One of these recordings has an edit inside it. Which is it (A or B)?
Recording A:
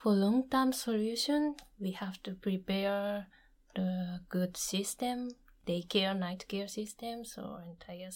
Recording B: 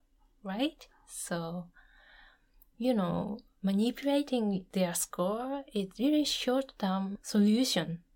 B